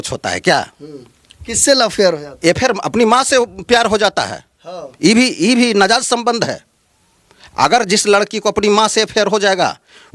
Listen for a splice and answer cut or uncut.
uncut